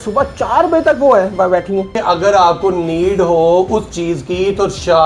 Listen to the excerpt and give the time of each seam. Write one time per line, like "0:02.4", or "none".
0:01.9